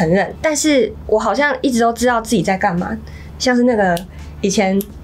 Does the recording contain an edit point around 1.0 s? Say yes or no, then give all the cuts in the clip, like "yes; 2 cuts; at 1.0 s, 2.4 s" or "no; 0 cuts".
no; 1 cut; at 3.2 s